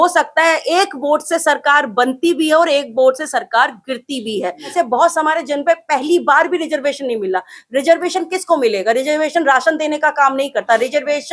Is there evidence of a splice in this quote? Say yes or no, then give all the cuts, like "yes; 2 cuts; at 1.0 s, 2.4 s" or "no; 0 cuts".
yes; 1 cut; at 4.7 s